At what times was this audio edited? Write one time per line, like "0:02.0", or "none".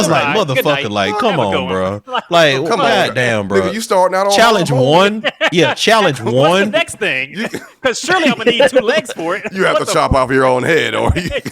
none